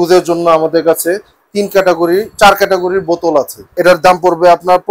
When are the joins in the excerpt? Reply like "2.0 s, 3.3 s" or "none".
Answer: 3.6 s